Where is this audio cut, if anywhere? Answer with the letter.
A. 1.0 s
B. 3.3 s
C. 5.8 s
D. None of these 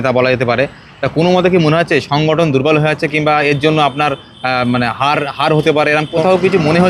C